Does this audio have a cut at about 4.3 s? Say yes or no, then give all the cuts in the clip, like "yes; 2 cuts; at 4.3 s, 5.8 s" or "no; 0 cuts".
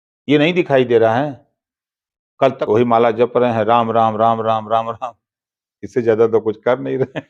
no; 1 cut; at 2.6 s